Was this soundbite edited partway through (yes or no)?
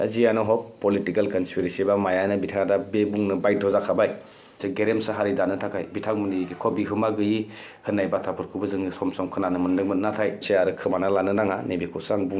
yes